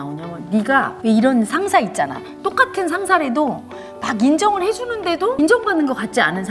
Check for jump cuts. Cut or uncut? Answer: cut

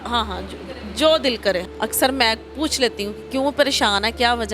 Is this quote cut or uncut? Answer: cut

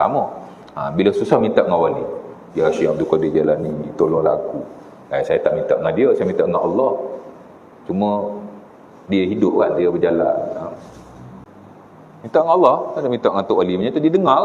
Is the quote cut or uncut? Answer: cut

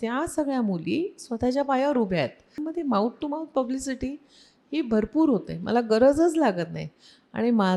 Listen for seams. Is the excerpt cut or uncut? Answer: cut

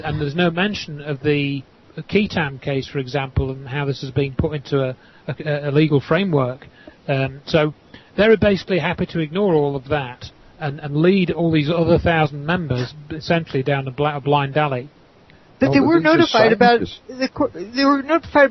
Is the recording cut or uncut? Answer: uncut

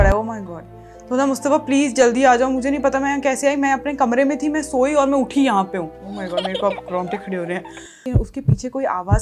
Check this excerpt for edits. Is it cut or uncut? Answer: cut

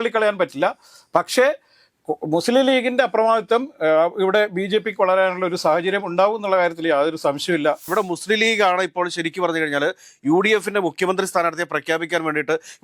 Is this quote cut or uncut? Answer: cut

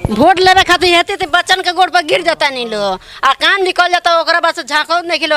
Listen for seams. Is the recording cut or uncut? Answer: uncut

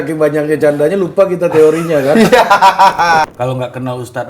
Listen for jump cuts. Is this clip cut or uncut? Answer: cut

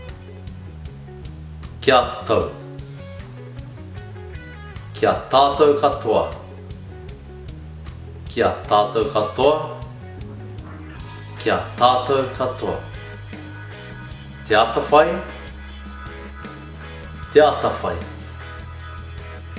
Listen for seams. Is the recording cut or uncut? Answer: cut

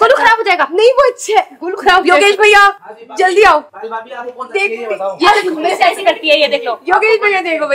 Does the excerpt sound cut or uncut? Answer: uncut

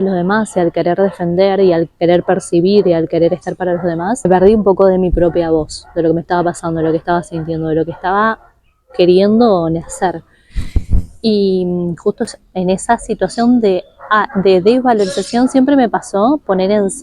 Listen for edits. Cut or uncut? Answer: cut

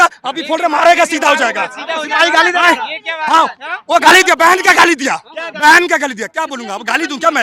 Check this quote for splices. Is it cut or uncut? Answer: uncut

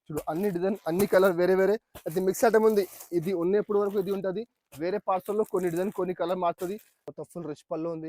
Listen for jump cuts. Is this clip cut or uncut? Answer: cut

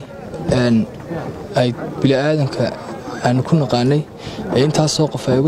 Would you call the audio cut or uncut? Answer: uncut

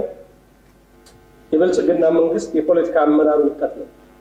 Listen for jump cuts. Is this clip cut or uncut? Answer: uncut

